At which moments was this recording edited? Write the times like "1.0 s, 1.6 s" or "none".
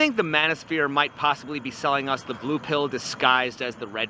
none